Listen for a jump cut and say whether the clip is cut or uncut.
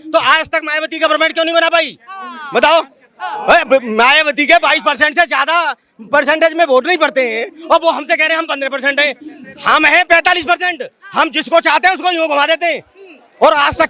uncut